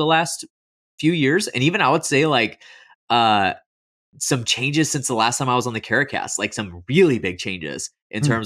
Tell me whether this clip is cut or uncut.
uncut